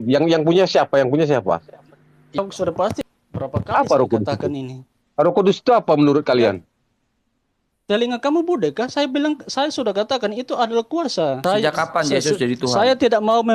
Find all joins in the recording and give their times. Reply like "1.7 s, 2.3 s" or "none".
3.0 s, 11.4 s